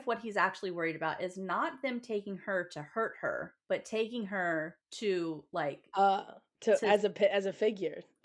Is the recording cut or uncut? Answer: cut